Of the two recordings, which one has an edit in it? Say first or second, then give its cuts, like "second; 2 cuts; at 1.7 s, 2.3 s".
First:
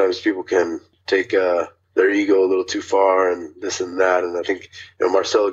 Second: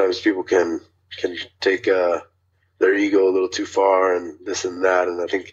first; 2 cuts; at 0.9 s, 1.8 s